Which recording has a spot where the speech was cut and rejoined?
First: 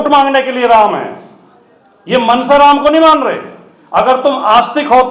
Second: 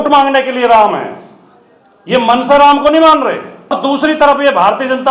second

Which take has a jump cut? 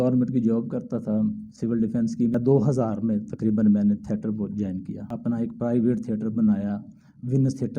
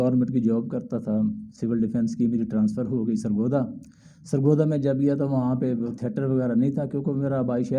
first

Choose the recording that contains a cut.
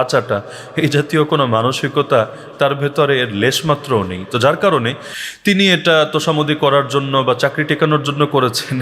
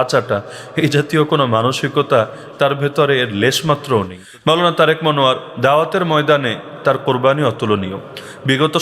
second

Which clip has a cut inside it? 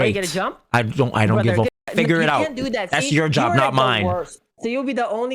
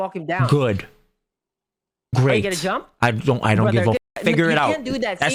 first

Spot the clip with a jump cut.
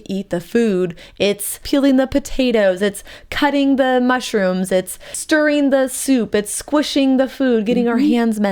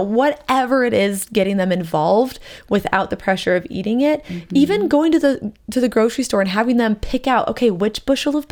first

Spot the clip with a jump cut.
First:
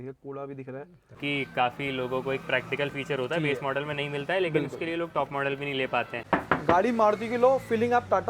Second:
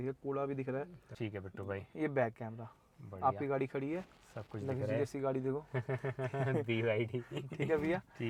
first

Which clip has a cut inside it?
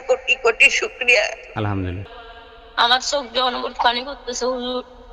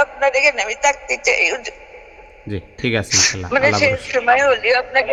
first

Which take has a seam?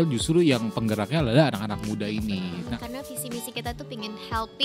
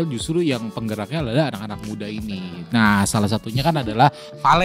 first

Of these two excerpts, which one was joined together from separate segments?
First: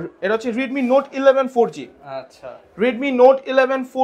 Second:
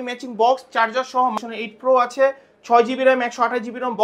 second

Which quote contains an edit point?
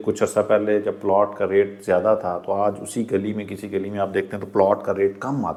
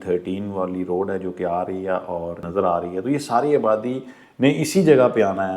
second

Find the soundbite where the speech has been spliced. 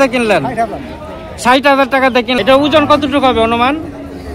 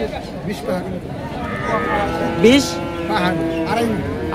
first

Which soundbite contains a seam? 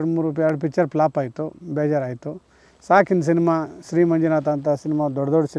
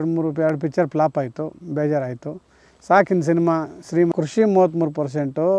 second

